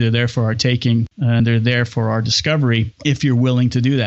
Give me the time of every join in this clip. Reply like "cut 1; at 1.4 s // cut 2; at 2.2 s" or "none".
cut 1; at 1.4 s // cut 2; at 2.9 s